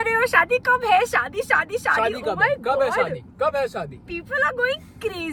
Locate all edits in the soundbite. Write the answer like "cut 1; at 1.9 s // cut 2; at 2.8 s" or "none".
none